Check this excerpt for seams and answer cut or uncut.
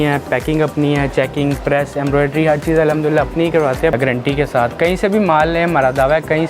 cut